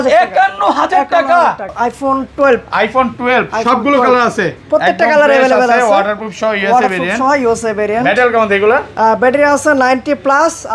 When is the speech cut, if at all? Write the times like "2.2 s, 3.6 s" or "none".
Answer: 1.7 s